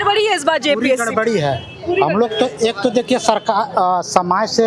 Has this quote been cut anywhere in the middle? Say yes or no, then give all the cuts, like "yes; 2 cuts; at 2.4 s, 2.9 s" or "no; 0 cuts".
no; 0 cuts